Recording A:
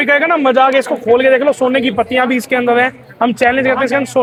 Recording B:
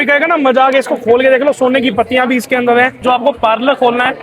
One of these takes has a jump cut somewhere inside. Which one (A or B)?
B